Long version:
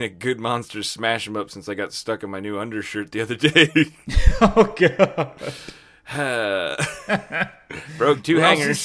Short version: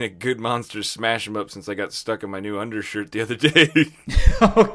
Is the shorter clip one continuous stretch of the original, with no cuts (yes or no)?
yes